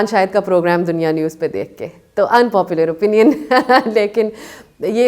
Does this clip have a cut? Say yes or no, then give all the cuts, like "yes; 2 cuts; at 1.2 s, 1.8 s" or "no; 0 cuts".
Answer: no; 0 cuts